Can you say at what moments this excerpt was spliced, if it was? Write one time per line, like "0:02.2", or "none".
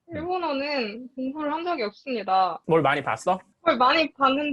0:02.6